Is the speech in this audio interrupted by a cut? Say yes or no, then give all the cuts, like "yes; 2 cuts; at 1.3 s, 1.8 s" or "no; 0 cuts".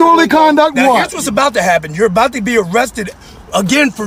no; 0 cuts